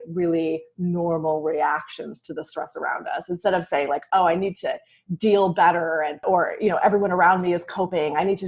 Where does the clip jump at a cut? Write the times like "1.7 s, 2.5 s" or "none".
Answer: 6.2 s